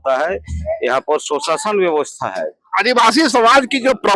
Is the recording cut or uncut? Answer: uncut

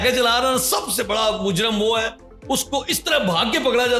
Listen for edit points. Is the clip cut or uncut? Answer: uncut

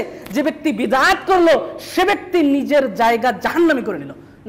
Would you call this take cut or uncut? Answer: uncut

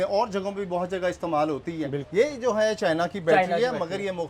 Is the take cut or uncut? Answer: cut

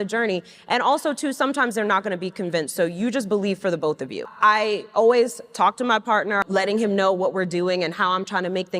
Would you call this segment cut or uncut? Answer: cut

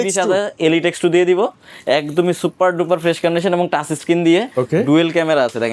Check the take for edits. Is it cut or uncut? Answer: uncut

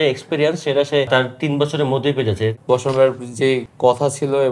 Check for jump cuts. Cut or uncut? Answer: cut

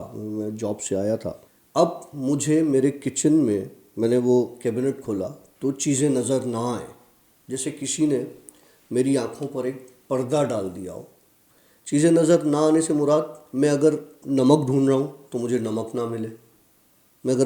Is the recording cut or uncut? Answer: cut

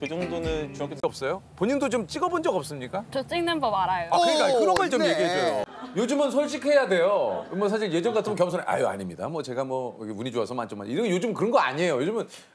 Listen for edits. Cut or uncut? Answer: cut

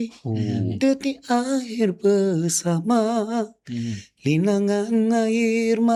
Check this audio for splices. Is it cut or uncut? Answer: uncut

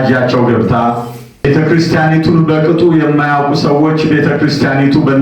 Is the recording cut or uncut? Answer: cut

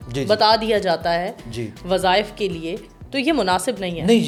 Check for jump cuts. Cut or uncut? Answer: uncut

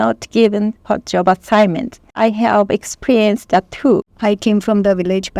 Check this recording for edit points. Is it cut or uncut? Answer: cut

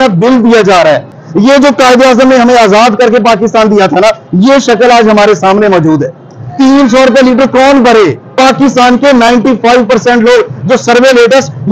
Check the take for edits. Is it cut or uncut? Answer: cut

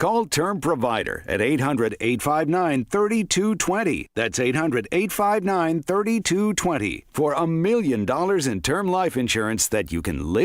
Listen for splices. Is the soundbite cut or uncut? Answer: uncut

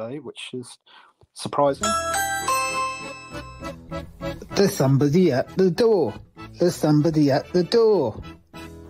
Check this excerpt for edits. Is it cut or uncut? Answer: uncut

